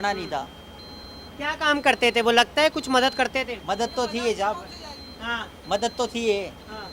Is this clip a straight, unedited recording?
yes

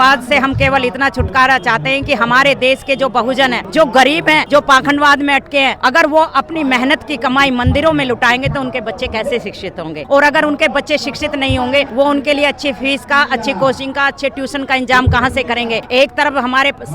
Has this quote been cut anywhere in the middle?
yes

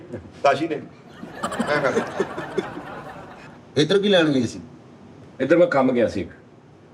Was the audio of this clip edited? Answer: yes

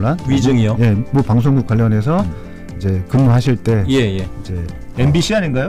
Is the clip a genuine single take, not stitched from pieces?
yes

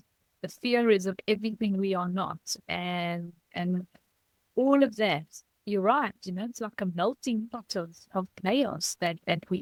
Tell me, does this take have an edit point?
no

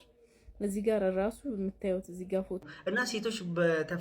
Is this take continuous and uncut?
no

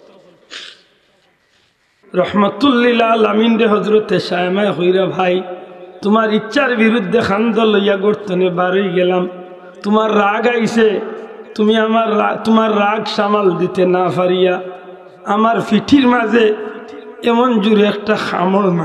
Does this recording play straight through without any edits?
no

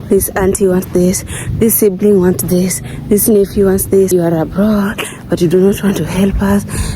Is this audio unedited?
no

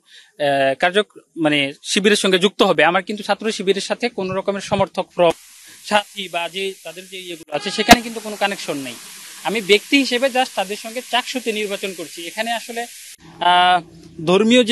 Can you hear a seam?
no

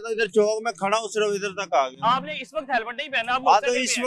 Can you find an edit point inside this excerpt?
no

